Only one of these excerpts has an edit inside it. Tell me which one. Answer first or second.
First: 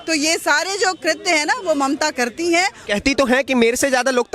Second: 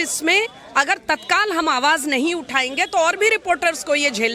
first